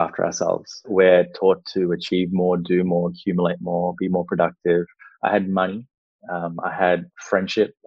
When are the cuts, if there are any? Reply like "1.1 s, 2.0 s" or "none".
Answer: 0.8 s, 5.0 s